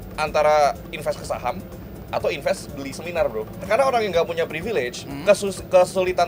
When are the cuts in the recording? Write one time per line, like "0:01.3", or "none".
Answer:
0:03.7